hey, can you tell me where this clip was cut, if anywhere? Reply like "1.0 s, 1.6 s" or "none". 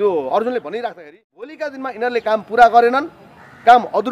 1.7 s